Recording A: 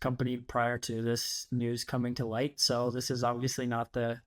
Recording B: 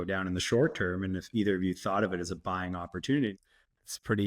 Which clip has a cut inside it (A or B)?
B